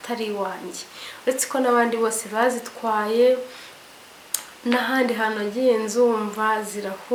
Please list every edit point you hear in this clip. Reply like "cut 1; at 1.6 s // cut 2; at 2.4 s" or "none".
none